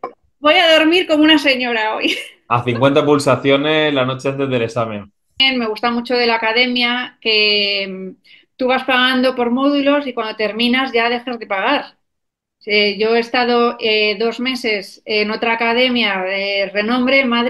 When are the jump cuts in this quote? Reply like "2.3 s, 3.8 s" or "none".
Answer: 5.4 s